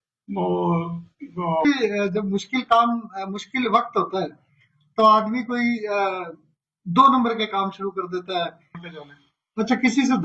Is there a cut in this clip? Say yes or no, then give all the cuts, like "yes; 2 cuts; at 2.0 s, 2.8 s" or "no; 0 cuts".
yes; 2 cuts; at 1.6 s, 8.9 s